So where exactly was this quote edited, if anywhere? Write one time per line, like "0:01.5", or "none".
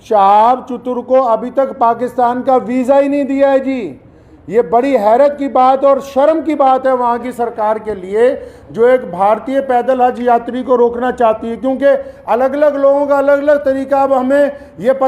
none